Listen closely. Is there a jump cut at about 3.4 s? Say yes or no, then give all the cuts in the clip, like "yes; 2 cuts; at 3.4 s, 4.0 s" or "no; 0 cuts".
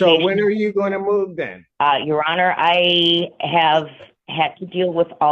no; 1 cut; at 1.6 s